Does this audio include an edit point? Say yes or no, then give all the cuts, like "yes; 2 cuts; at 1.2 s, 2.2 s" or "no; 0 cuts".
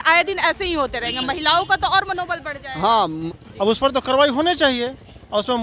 yes; 1 cut; at 3.2 s